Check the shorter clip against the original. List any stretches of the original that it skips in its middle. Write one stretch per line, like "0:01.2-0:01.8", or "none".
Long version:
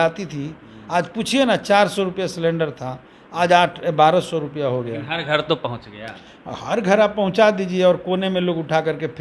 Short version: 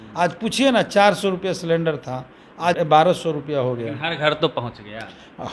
0:03.5-0:03.8